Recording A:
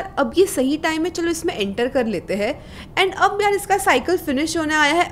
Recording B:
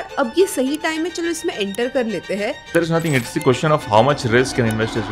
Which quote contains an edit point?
B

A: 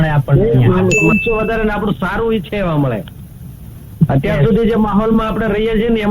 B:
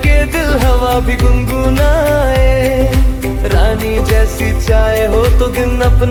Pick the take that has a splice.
A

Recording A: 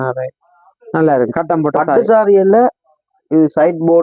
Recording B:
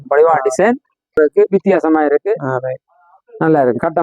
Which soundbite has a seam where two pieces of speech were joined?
B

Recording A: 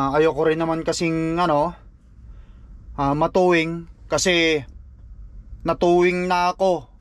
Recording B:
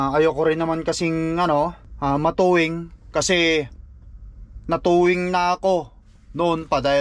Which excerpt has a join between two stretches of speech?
B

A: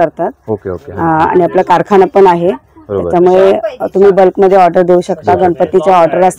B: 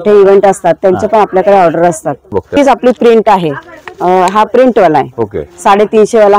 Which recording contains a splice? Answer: B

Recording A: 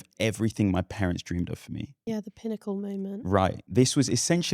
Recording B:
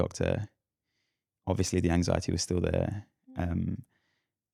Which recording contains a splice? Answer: A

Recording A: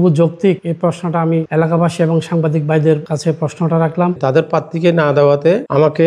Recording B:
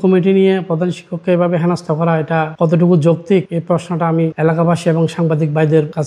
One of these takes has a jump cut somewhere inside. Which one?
A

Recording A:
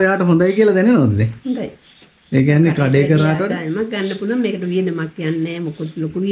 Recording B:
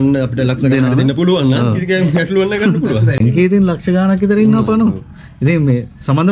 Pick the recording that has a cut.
B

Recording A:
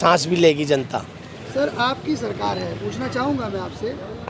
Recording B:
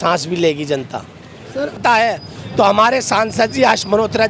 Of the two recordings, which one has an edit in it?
B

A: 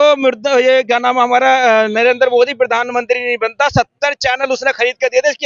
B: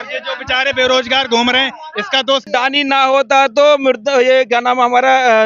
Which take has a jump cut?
B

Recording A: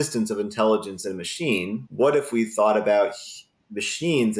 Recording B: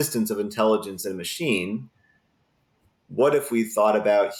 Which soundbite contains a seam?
A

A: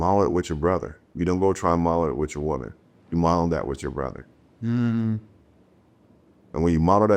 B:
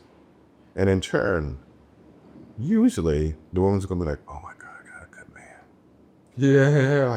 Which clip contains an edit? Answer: A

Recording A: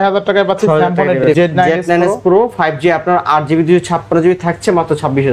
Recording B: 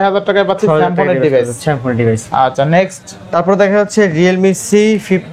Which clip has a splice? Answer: A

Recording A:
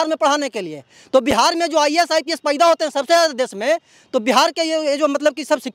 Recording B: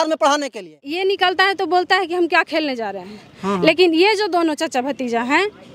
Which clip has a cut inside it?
B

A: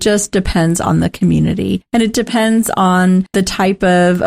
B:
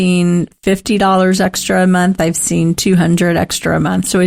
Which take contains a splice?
A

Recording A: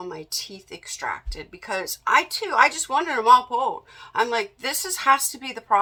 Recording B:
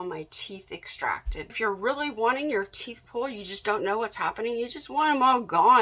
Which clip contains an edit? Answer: B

